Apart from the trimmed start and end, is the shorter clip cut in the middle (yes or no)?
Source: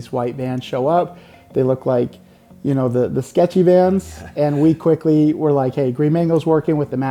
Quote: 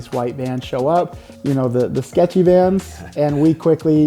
yes